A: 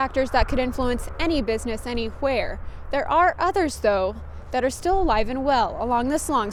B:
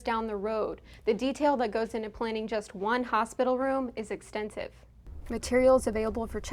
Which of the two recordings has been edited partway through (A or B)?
B